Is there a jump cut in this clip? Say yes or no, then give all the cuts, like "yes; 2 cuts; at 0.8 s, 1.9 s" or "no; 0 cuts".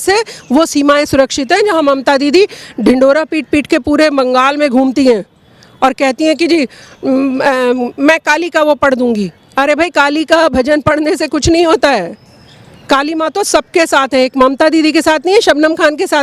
no; 0 cuts